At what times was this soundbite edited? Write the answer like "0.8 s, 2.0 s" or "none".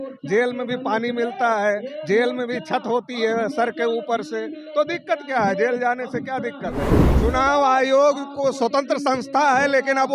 7.0 s